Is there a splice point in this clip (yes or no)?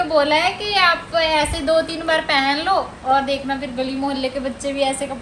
no